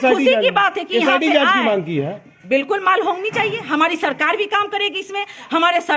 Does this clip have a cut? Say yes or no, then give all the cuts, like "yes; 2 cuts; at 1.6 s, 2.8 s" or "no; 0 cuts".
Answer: no; 0 cuts